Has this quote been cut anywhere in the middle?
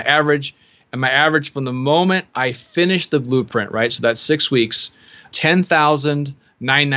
yes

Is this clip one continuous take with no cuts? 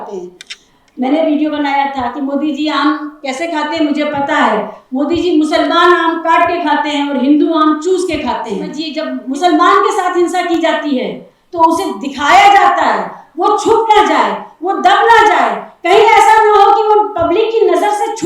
no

